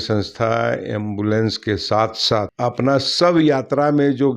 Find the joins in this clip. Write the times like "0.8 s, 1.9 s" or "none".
2.5 s

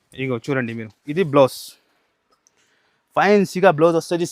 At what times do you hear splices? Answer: 1.0 s

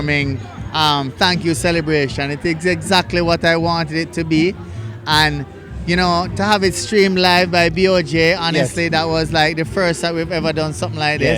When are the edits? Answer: none

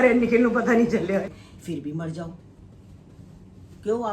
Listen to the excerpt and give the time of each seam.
1.3 s

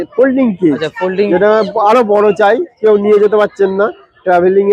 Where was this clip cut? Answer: none

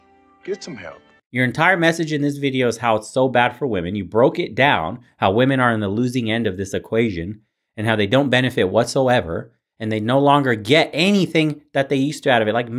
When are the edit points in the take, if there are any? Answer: none

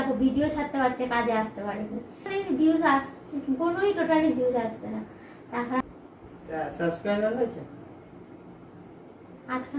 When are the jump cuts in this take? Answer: 2.3 s, 5.8 s

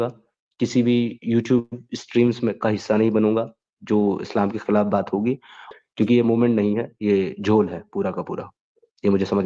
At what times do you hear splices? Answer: 5.6 s

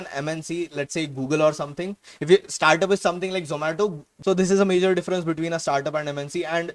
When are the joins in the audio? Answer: 4.1 s

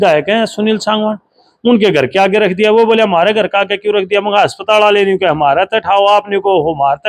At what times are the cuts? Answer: none

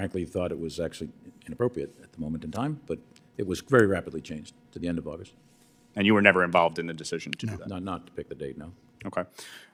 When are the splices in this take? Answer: none

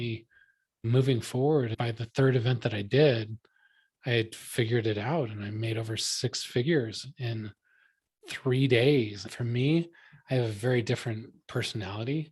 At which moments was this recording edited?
9.2 s

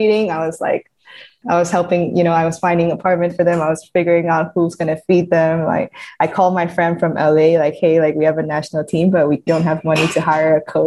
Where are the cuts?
1.4 s, 9.5 s

